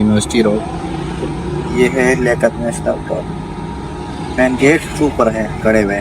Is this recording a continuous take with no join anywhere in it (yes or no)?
yes